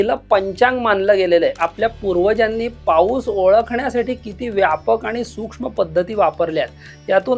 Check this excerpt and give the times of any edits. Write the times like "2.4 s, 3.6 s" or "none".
1.6 s